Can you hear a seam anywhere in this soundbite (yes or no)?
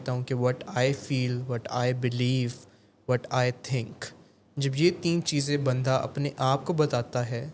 no